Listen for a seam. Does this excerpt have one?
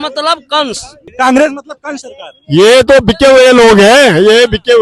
yes; 1 cut; at 1.1 s

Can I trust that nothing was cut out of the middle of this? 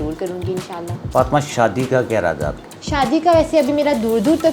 yes; 0 cuts

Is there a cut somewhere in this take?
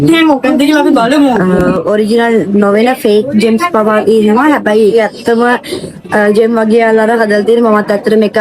yes; 1 cut; at 1.7 s

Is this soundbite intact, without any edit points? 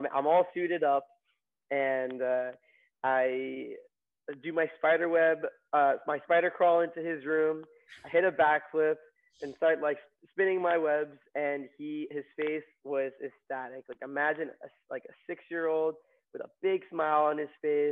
yes; 0 cuts

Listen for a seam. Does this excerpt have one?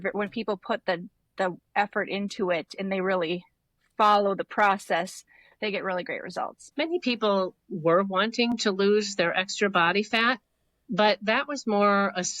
yes; 1 cut; at 6.6 s

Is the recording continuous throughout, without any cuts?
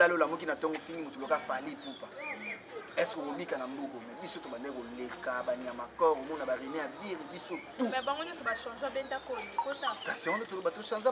yes; 0 cuts

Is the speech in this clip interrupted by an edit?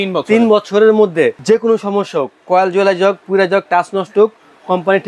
yes; 1 cut; at 1.4 s

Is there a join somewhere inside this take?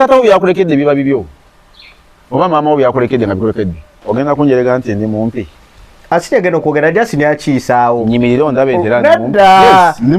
yes; 1 cut; at 4.0 s

